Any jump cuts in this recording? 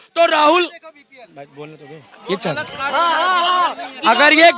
no; 0 cuts

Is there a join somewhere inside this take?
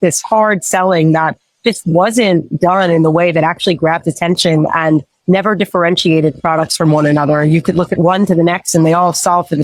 no; 0 cuts

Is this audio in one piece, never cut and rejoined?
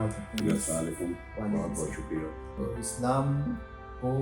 no; 1 cut; at 2.5 s

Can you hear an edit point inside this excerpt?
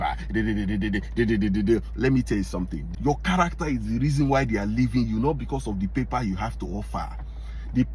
yes; 1 cut; at 2.8 s

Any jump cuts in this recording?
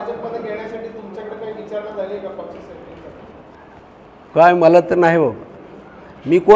no; 0 cuts

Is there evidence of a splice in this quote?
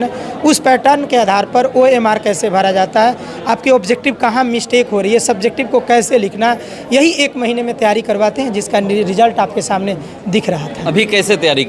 no; 0 cuts

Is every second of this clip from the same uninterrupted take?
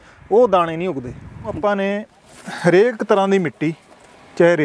no; 1 cut; at 1.6 s

